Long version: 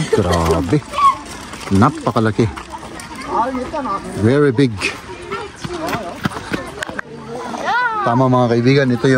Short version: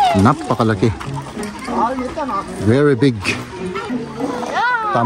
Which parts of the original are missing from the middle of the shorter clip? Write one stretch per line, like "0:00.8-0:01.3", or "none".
0:05.5-0:07.1